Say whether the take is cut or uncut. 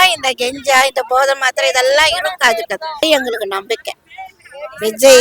cut